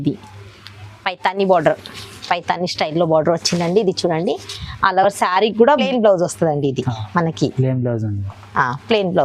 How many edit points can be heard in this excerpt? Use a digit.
1